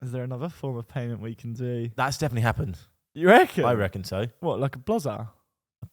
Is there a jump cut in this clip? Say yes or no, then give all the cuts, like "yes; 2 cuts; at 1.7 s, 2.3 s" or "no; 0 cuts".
no; 0 cuts